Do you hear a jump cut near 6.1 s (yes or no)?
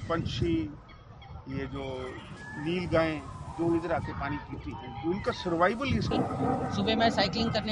yes